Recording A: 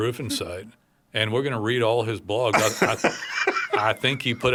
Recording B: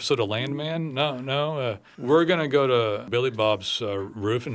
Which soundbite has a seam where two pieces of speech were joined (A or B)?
B